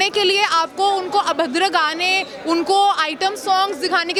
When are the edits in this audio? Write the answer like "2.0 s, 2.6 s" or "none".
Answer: none